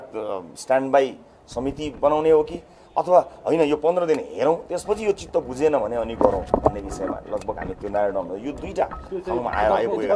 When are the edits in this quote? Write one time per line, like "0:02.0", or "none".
none